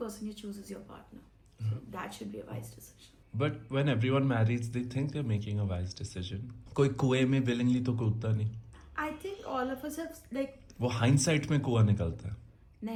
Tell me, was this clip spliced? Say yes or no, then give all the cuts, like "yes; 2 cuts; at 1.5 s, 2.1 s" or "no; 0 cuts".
no; 0 cuts